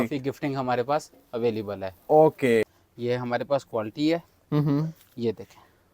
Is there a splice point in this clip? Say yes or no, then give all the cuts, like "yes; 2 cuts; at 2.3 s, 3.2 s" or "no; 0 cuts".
yes; 1 cut; at 2.8 s